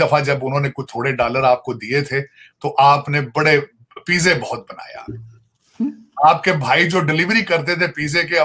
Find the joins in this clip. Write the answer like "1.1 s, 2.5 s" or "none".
none